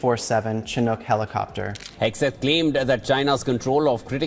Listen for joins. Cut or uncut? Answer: cut